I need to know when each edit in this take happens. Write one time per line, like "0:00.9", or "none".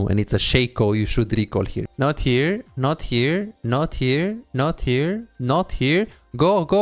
0:01.8